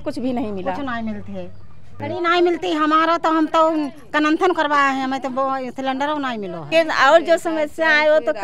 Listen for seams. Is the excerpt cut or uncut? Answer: cut